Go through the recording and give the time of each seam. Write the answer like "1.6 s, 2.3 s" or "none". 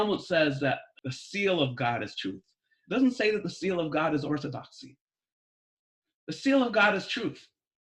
0.9 s